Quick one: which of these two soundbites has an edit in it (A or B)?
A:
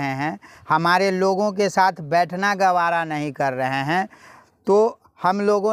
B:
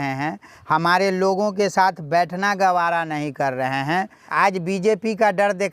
B